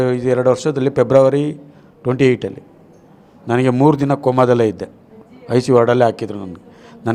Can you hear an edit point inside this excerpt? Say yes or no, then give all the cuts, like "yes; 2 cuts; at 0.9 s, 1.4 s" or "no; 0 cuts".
no; 0 cuts